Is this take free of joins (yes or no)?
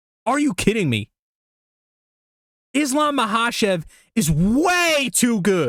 yes